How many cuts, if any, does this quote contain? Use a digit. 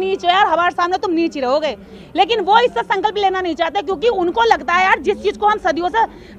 0